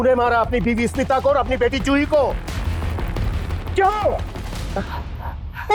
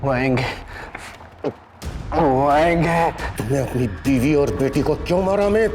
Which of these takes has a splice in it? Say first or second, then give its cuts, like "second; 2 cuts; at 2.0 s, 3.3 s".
second; 1 cut; at 3.3 s